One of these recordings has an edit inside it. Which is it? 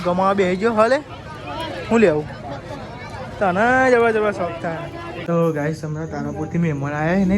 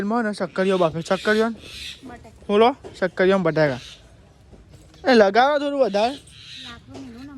first; 1 cut; at 5.2 s

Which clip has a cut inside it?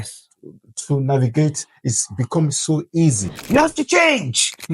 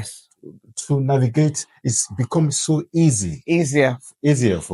first; 1 cut; at 3.3 s

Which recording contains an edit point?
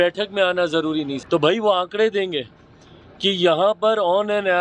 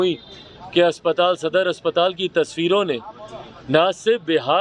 first; 1 cut; at 1.2 s

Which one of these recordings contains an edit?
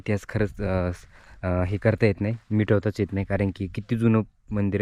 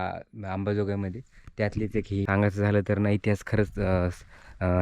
second; 1 cut; at 2.3 s

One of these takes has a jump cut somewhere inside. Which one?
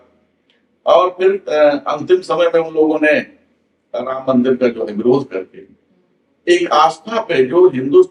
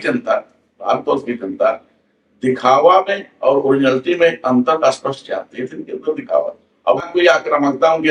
second; 1 cut; at 7.0 s

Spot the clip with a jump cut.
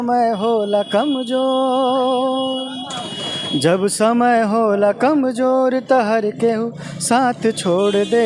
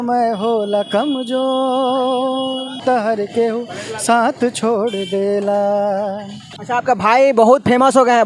second; 2 cuts; at 2.8 s, 6.5 s

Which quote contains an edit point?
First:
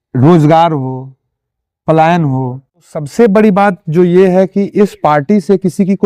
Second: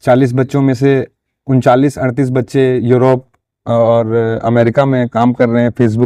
first; 1 cut; at 3.0 s

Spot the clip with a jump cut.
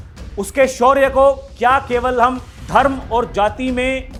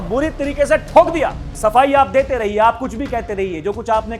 second; 1 cut; at 1.5 s

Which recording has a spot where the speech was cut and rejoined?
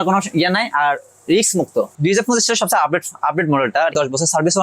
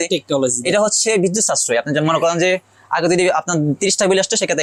first; 2 cuts; at 1.9 s, 3.9 s

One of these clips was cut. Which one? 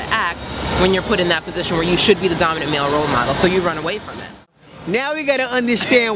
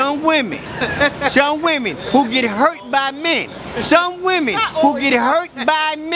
first; 1 cut; at 4.2 s

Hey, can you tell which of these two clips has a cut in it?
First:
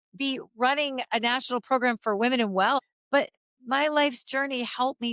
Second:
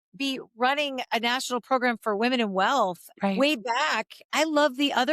first; 1 cut; at 2.8 s

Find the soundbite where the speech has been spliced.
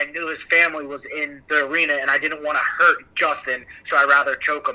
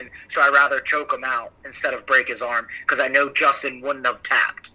first; 1 cut; at 1.4 s

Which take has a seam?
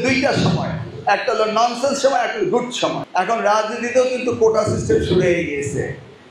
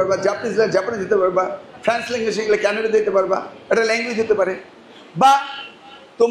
first; 1 cut; at 3.0 s

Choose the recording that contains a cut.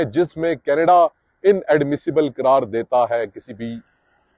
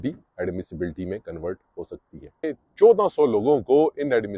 second; 1 cut; at 2.6 s

